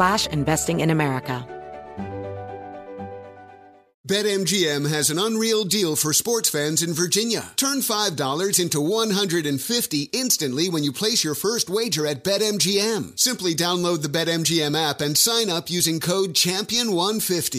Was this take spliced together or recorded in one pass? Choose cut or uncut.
cut